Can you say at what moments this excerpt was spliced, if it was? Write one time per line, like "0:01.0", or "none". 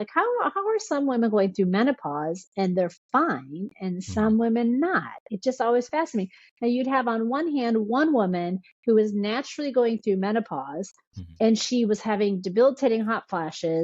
none